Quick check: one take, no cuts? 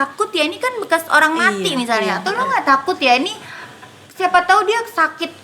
yes; 0 cuts

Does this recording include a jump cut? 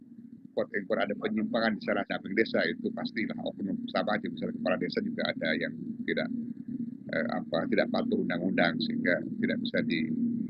yes; 1 cut; at 2.2 s

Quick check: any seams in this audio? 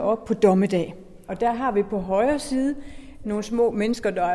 yes; 2 cuts; at 1.2 s, 3.2 s

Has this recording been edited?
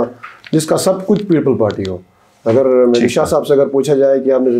no; 0 cuts

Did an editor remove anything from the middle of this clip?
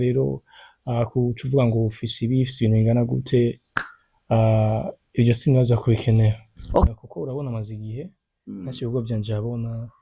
yes; 1 cut; at 6.9 s

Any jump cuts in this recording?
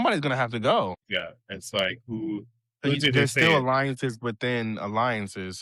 yes; 1 cut; at 1.0 s

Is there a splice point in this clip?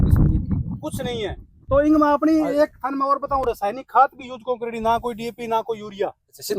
yes; 1 cut; at 1.5 s

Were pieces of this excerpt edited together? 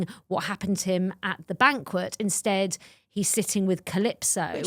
no; 0 cuts

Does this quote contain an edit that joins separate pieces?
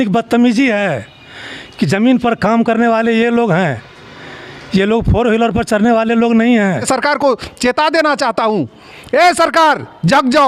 yes; 1 cut; at 6.8 s

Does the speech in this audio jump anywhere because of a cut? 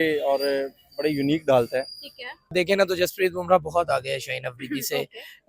yes; 1 cut; at 2.5 s

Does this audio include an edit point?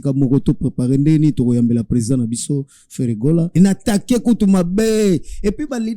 yes; 1 cut; at 3.5 s

